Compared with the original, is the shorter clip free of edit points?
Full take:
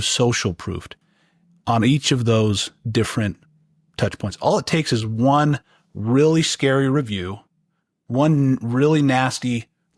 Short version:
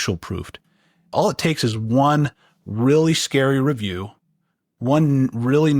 no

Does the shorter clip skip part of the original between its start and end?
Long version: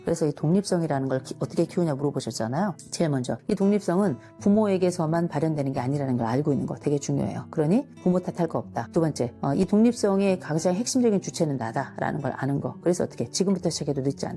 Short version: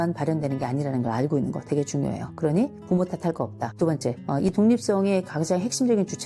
no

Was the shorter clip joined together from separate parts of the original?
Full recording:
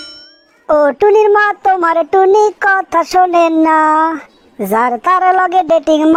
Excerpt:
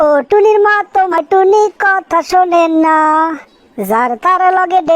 yes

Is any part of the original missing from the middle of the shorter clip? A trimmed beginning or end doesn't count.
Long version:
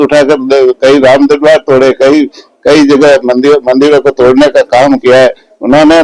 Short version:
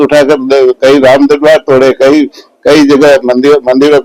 no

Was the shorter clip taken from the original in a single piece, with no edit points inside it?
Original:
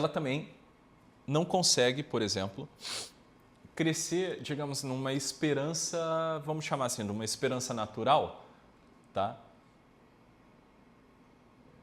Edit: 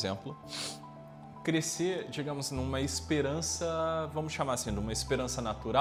yes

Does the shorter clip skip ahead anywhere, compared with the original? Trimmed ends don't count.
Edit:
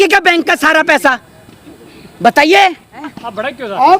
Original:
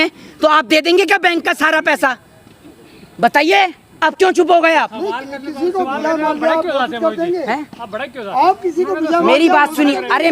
yes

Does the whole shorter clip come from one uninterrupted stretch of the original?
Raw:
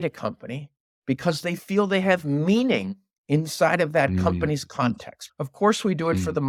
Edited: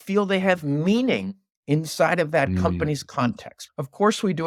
yes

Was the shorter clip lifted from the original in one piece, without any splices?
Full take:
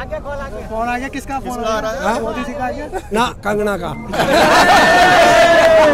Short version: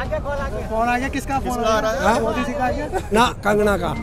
yes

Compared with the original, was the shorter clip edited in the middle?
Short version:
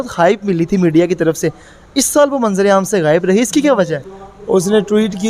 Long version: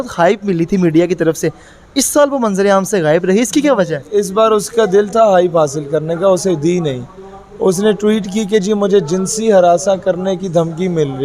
yes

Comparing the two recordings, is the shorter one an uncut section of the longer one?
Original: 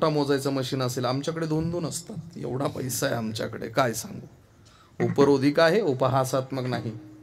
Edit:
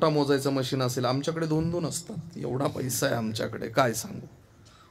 yes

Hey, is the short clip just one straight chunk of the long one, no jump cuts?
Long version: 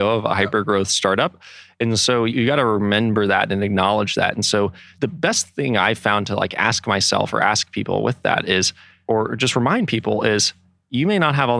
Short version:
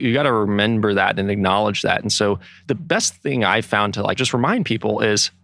no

